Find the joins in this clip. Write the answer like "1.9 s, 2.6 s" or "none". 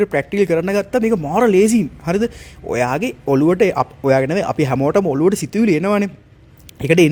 none